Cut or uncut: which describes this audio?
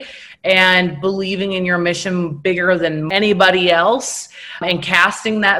cut